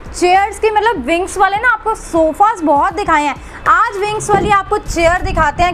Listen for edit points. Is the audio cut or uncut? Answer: uncut